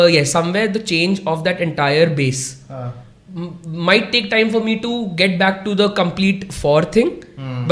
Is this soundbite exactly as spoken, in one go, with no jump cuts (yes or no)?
yes